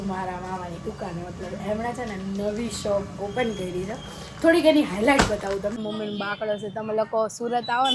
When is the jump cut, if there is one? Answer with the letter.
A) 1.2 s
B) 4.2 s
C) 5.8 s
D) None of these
C